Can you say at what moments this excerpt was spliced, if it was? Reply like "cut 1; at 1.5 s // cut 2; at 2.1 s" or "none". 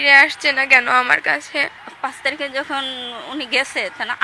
cut 1; at 1.8 s